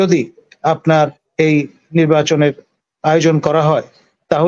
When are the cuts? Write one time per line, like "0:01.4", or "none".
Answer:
none